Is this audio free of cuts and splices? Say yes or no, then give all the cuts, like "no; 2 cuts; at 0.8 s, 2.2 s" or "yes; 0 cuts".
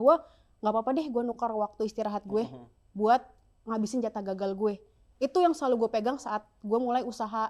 yes; 0 cuts